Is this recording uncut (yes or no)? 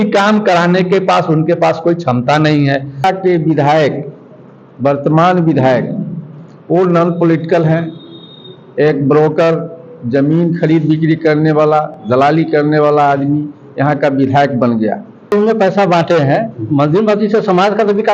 no